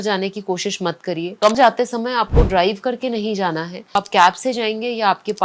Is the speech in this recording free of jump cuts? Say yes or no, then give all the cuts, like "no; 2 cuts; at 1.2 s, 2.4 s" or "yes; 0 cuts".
no; 2 cuts; at 1.6 s, 4.0 s